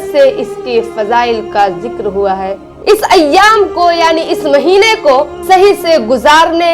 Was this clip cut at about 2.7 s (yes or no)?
yes